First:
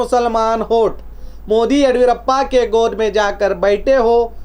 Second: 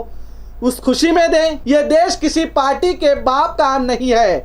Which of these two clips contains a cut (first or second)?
second